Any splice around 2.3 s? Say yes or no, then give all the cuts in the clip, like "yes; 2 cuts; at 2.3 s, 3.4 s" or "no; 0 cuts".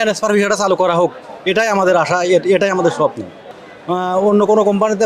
no; 1 cut; at 3.6 s